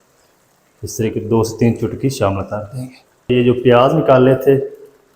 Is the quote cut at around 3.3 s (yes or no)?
yes